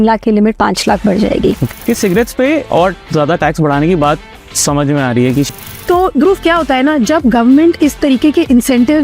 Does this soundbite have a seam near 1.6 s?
yes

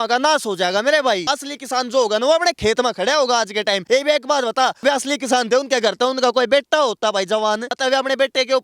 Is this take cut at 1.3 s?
yes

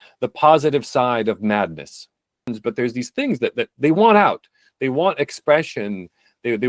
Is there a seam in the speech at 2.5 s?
yes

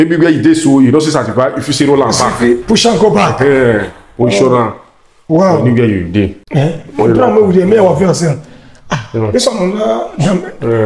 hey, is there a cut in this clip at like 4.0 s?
no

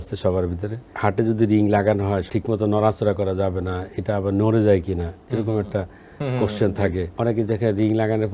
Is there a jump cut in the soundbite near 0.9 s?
yes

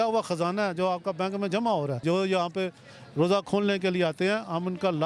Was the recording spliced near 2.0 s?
yes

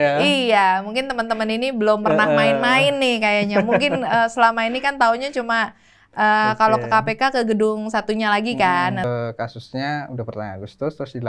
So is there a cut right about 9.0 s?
yes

